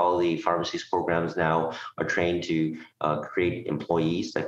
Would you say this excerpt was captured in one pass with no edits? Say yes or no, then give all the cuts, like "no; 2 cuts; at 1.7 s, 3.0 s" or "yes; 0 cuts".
yes; 0 cuts